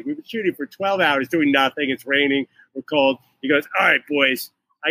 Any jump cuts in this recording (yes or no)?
no